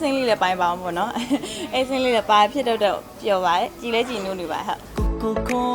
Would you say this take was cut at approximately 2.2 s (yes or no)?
no